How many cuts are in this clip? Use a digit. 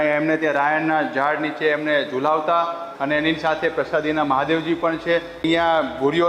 2